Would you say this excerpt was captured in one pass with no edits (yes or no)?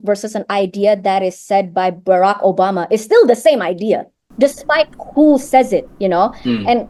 no